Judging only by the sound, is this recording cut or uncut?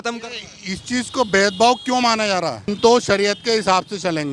cut